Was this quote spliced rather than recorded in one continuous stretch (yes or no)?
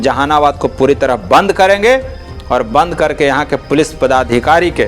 no